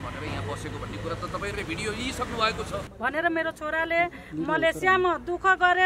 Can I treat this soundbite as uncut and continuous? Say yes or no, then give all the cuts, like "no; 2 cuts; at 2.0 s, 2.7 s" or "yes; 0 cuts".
no; 1 cut; at 2.9 s